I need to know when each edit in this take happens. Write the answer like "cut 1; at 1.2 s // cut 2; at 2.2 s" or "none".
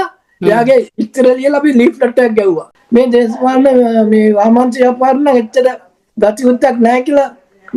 cut 1; at 2.7 s